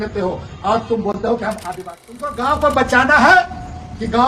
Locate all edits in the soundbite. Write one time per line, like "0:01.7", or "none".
0:01.7